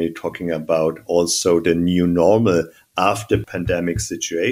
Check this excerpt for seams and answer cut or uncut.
cut